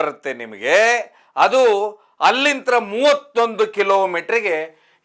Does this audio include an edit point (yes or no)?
no